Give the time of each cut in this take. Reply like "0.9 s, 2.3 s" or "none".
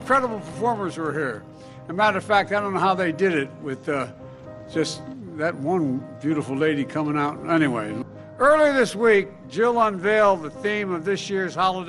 8.0 s

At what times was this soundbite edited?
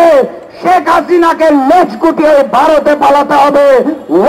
none

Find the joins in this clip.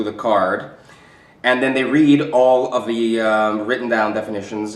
1.0 s

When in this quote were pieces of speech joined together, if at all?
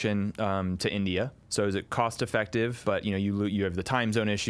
1.4 s, 2.8 s

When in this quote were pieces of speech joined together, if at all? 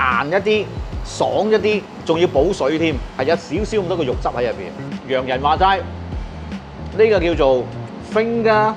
1.9 s, 4.7 s

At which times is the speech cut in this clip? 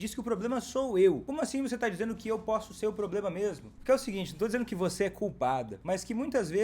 1.3 s, 3.7 s, 5.7 s

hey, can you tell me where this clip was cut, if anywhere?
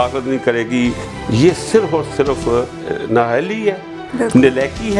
1.1 s, 2.9 s

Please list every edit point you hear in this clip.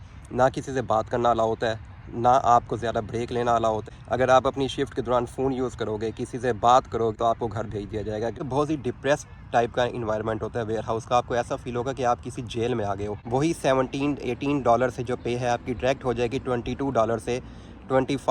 3.9 s, 7.2 s, 8.4 s, 13.1 s

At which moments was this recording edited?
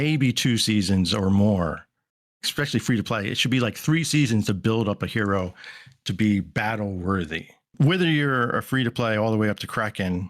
7.7 s

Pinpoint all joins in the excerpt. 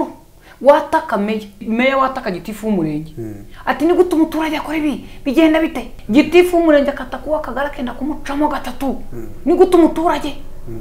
1.6 s, 5.9 s

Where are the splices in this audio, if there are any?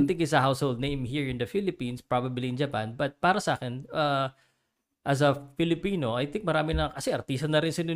none

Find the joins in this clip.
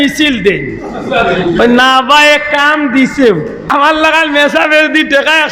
3.6 s

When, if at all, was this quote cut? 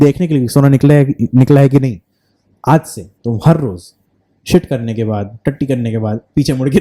none

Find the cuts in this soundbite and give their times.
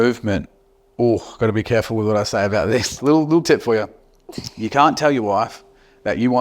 3.0 s

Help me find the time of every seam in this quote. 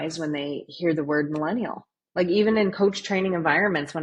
none

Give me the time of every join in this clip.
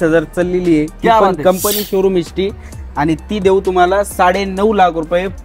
none

